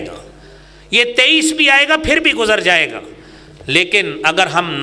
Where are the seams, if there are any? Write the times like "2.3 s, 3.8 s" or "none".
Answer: none